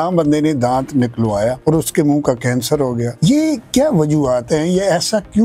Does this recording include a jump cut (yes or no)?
no